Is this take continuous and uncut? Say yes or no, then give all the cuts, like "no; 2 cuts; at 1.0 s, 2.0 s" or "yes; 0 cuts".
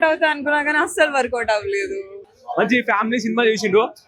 no; 1 cut; at 2.4 s